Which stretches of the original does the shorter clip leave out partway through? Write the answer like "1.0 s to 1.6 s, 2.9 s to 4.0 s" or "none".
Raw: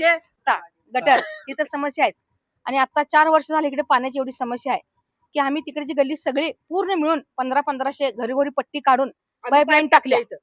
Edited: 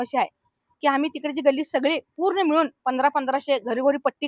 none